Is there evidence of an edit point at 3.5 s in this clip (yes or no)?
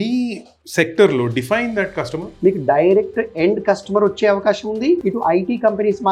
no